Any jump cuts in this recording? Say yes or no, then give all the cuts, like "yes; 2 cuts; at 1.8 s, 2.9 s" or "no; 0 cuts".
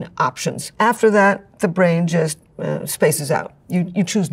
no; 0 cuts